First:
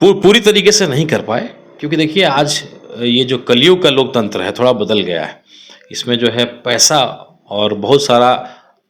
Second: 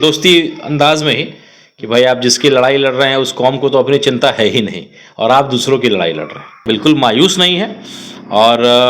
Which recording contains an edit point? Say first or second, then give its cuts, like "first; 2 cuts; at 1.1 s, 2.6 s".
second; 1 cut; at 6.6 s